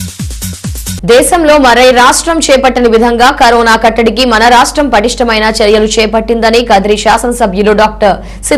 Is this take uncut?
no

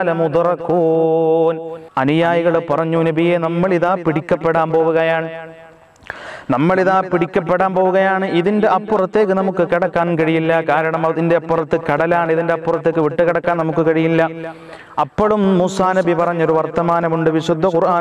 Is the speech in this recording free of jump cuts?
no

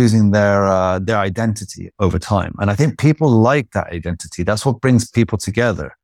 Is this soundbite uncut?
yes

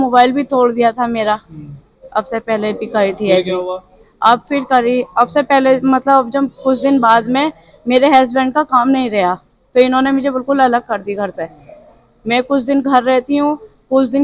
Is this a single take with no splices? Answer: yes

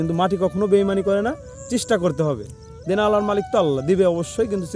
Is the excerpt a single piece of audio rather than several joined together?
yes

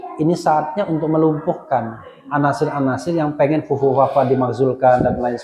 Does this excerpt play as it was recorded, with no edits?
yes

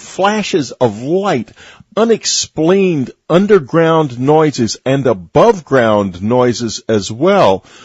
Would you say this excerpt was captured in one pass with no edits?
no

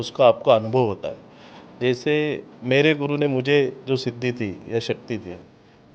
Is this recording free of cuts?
yes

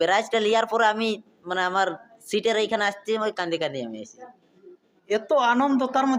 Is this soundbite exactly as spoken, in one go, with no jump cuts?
yes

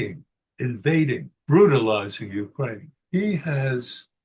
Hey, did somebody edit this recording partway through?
yes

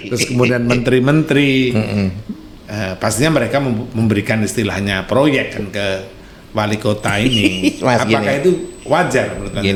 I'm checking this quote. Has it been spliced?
no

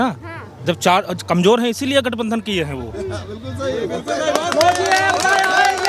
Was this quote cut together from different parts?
no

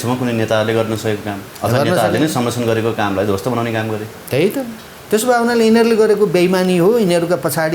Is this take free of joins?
yes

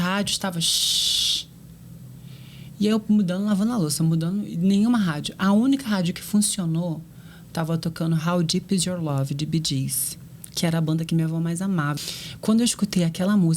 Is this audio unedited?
no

